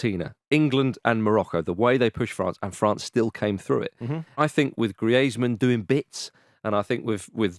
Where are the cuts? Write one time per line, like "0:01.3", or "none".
0:04.4